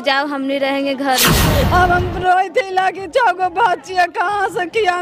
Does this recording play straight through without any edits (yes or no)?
no